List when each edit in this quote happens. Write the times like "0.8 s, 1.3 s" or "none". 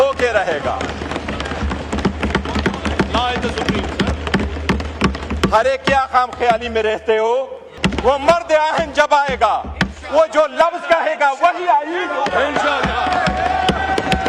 7.8 s